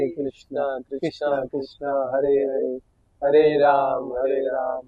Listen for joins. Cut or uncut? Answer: uncut